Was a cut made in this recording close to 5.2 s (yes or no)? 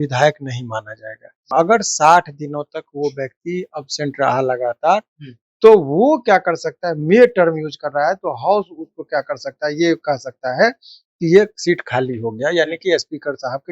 no